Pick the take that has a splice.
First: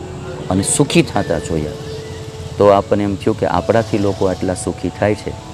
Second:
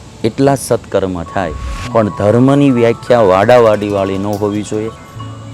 second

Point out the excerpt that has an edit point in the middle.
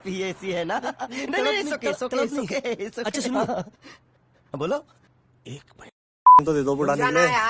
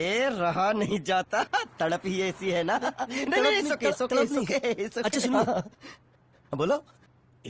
first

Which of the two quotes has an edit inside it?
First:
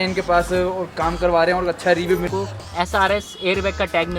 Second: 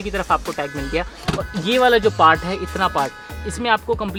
first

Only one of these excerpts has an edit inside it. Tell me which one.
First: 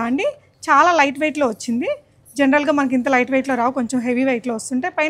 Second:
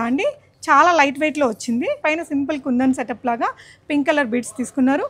second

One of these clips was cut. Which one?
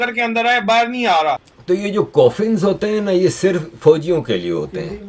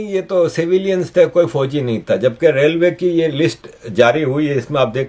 first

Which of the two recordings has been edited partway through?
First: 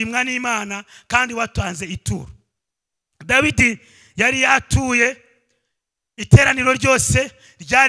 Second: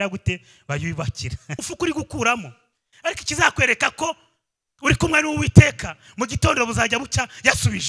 second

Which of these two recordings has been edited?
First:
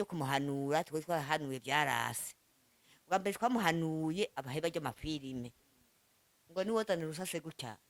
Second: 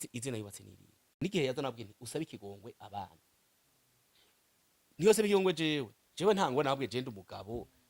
second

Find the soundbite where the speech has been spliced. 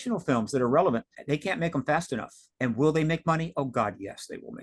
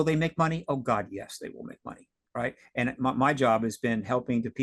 first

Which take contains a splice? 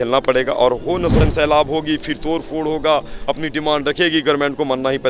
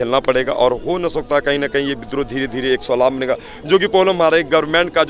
first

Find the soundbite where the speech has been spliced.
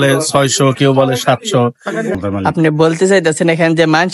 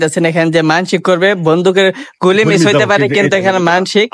first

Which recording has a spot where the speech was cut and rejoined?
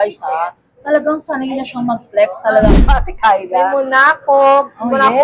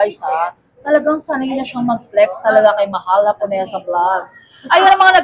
first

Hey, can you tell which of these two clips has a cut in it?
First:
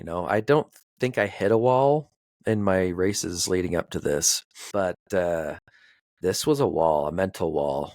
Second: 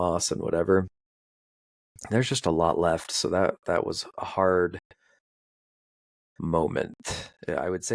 first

